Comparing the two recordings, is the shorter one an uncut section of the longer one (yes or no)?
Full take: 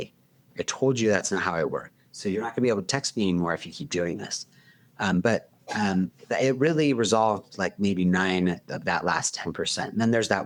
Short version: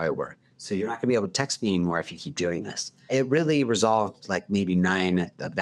no